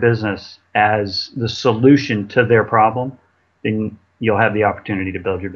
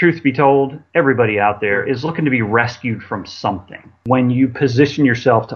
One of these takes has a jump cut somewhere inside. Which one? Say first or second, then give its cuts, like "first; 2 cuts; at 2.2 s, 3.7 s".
second; 2 cuts; at 1.8 s, 4.0 s